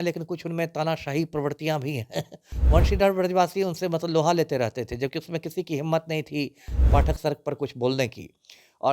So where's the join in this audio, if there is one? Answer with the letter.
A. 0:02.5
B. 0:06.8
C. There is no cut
A